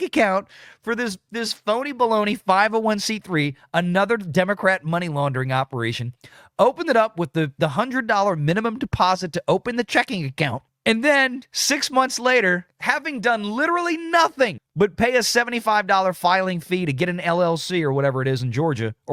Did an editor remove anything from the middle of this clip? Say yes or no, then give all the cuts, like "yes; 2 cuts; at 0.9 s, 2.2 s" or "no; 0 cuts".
no; 0 cuts